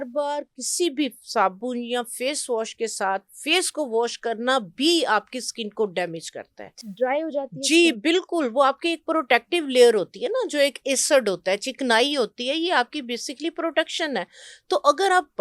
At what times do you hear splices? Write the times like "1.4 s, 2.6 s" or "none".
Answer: none